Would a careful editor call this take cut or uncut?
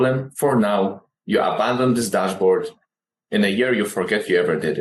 uncut